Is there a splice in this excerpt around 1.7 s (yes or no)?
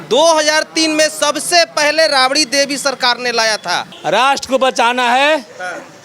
no